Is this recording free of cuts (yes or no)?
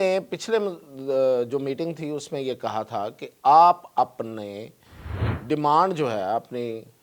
yes